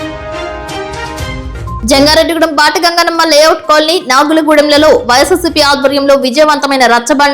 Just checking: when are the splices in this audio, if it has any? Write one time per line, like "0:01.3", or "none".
0:01.2